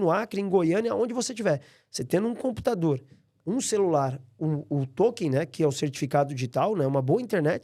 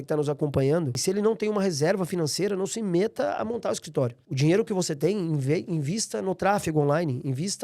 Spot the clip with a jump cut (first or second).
second